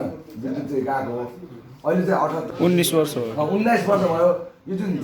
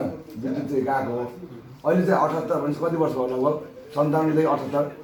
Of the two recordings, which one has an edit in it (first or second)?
first